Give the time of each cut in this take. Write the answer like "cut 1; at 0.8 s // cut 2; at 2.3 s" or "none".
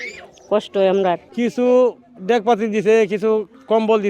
cut 1; at 1.3 s